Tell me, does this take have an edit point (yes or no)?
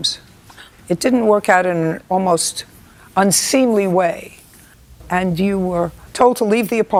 no